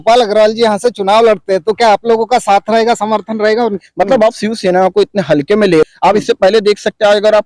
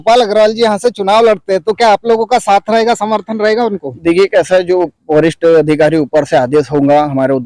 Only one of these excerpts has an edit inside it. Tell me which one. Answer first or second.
first